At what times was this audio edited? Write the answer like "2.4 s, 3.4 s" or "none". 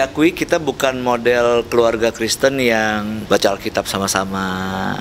3.2 s